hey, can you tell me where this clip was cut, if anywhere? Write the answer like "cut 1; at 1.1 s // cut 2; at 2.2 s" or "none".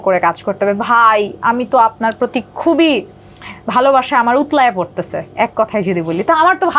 none